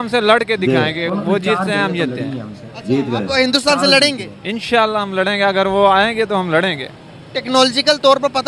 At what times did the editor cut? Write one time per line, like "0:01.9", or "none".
none